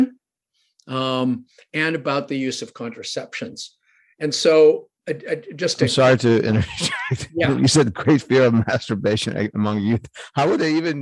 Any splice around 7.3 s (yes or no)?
no